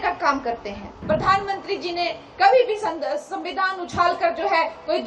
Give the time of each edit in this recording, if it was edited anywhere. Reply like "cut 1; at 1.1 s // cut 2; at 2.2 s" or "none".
cut 1; at 0.9 s

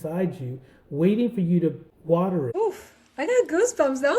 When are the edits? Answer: cut 1; at 2.1 s

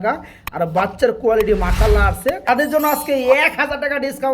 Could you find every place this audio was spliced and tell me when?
cut 1; at 2.7 s

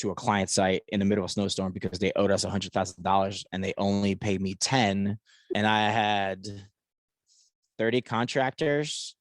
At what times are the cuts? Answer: cut 1; at 5.4 s

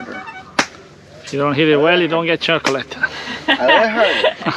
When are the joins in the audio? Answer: none

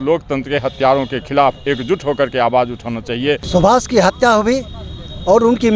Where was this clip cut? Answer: cut 1; at 3.4 s

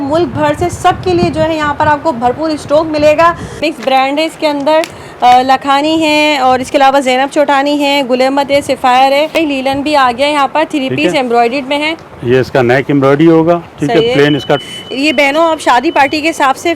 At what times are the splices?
cut 1; at 3.6 s // cut 2; at 9.3 s // cut 3; at 14.6 s

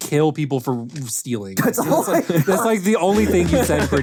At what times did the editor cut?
none

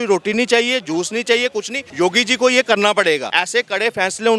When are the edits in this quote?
cut 1; at 1.8 s // cut 2; at 3.4 s

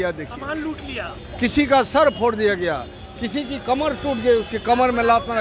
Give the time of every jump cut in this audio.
none

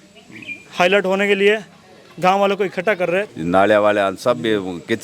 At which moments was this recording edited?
cut 1; at 3.3 s

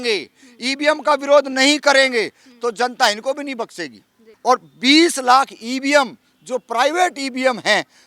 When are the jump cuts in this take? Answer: cut 1; at 4.2 s

